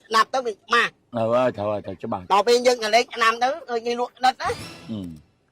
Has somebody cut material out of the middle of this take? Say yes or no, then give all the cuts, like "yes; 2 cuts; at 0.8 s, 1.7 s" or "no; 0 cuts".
yes; 1 cut; at 2.2 s